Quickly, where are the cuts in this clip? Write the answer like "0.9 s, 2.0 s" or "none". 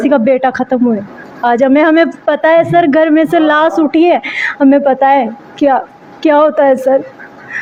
none